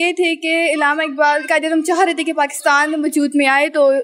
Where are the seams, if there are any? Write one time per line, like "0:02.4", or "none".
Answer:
none